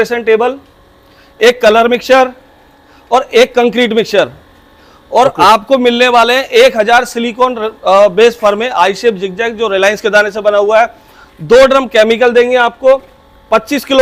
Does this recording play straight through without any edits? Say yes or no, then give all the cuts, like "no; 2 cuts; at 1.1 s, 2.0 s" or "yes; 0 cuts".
yes; 0 cuts